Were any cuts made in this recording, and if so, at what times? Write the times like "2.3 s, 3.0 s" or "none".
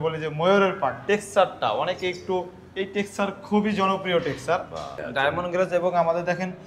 1.0 s, 4.9 s